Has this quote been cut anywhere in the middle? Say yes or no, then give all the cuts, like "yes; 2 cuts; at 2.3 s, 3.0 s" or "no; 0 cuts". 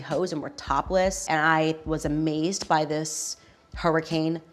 yes; 1 cut; at 1.2 s